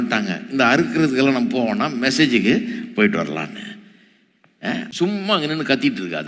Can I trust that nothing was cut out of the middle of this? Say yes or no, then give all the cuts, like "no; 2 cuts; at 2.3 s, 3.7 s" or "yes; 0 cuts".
no; 1 cut; at 4.9 s